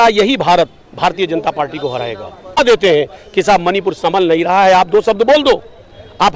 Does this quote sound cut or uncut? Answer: cut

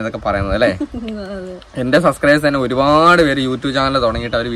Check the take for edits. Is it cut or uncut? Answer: uncut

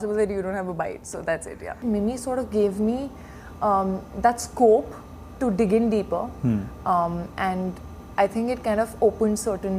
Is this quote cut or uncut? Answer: cut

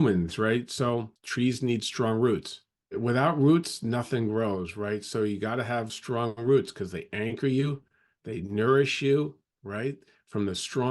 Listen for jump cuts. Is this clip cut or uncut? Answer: cut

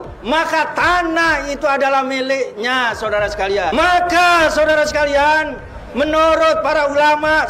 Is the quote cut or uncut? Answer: cut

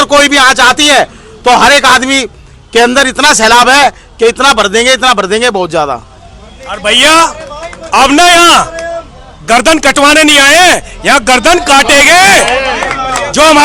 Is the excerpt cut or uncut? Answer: uncut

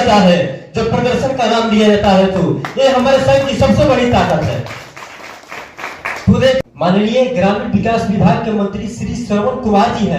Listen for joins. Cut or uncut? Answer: cut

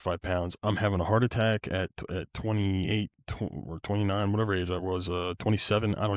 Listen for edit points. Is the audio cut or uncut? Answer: uncut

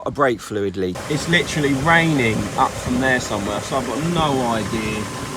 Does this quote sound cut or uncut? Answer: cut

